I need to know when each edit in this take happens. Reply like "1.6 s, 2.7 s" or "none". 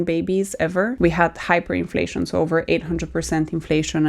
0.9 s